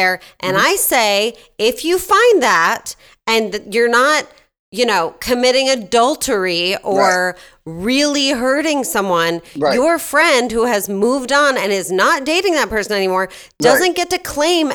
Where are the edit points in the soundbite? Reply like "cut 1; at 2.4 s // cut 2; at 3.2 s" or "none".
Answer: none